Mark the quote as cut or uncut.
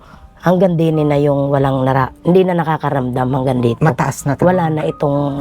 uncut